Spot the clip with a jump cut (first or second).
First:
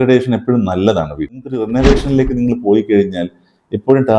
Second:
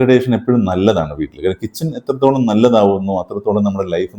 first